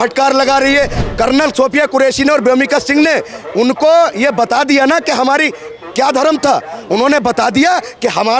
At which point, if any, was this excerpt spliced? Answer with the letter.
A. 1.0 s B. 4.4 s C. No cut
A